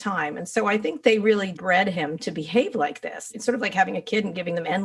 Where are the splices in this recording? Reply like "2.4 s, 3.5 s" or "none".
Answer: 1.5 s, 3.2 s